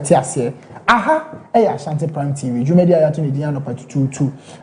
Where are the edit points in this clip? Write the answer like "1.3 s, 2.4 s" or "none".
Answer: none